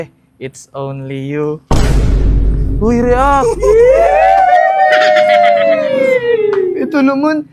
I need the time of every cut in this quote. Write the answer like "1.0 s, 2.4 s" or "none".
none